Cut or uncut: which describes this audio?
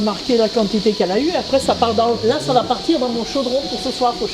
uncut